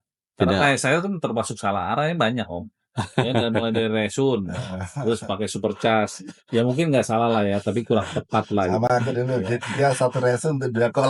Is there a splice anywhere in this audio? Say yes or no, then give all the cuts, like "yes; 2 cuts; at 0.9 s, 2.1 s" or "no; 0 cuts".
no; 0 cuts